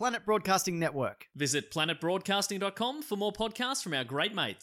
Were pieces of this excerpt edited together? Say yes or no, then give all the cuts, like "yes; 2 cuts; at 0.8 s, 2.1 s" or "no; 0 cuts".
no; 0 cuts